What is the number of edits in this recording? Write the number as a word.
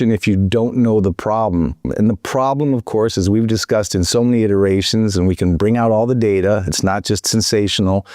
one